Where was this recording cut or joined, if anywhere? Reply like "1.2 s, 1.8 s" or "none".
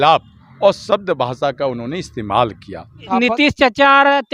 3.0 s